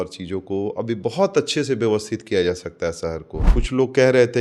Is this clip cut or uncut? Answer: cut